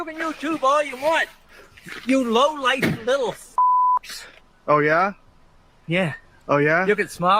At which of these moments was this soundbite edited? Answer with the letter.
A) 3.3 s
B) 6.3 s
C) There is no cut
B